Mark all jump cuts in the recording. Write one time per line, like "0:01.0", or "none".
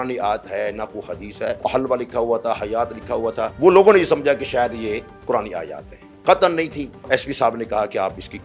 0:01.6
0:03.5
0:07.0

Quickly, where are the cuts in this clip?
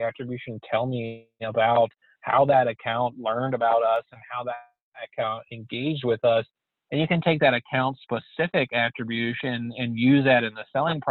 none

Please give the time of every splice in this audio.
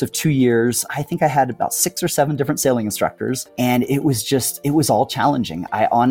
0:00.9
0:03.5

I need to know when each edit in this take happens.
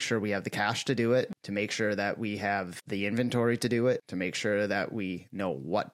0:01.4
0:02.8
0:04.1

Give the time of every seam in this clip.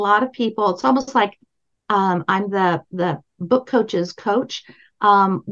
none

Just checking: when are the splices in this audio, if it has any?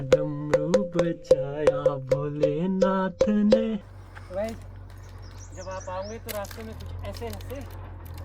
0:03.8

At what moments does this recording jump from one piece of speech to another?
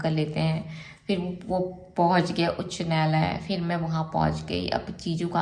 none

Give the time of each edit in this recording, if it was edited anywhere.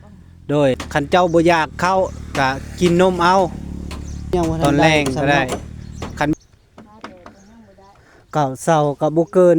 0:00.8
0:06.3

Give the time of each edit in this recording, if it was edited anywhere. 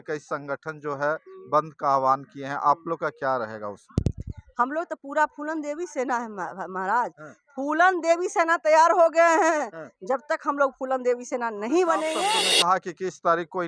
0:12.5

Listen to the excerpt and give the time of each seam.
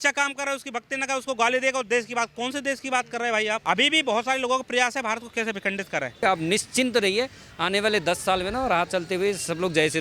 0:03.6
0:06.2

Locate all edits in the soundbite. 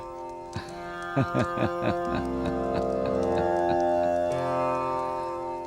none

